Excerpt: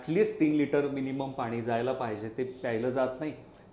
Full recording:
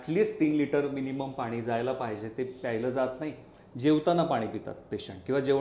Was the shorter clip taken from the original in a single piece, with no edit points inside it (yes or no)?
yes